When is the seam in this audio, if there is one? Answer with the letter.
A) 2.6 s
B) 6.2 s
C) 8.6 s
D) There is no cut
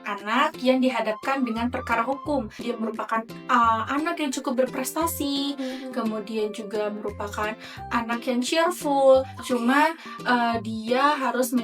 A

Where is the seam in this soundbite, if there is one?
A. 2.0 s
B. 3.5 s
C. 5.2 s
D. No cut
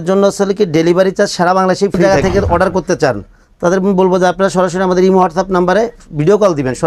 A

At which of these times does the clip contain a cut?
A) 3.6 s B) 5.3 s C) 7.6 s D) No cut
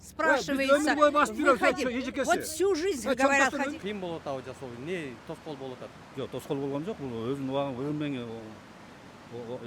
A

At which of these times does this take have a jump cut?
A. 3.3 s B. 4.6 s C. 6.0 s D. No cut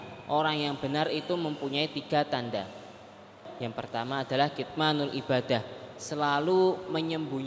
A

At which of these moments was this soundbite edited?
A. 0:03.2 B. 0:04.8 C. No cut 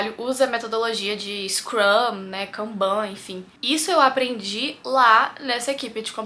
C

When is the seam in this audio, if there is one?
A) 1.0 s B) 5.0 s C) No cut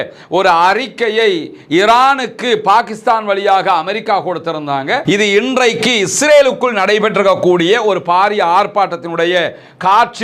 B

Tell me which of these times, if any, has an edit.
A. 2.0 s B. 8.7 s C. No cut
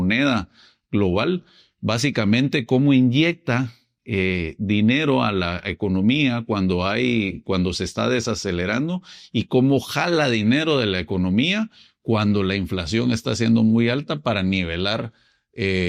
C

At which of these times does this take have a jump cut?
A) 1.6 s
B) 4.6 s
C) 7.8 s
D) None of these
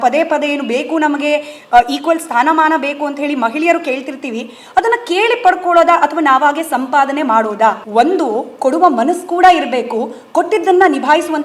C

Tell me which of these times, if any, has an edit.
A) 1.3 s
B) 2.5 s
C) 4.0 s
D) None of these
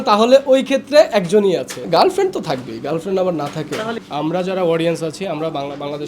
C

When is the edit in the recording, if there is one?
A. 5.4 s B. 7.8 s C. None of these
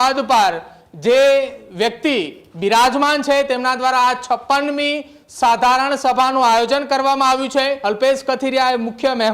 B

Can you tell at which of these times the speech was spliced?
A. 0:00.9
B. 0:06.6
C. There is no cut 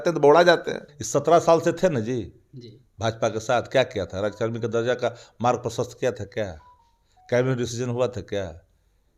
A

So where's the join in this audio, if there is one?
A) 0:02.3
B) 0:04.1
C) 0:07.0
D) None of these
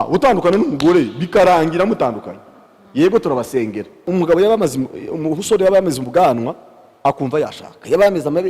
B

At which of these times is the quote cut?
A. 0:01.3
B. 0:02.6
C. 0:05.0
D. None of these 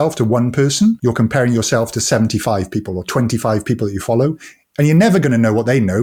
D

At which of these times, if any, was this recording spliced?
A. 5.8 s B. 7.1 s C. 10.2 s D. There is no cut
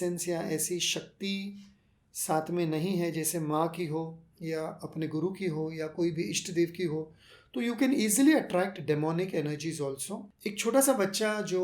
C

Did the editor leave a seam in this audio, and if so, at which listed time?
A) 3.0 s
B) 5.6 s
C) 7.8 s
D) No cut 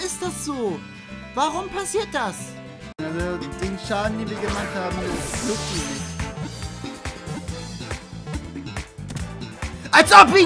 A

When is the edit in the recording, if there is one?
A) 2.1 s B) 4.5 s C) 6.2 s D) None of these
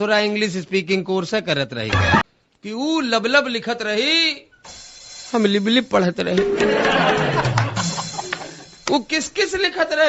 A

